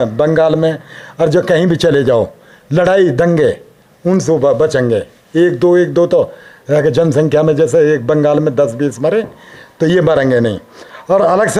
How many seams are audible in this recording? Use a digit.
0